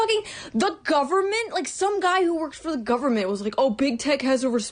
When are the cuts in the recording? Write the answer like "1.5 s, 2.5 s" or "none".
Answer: 2.4 s